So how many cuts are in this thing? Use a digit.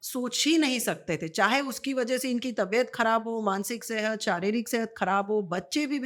0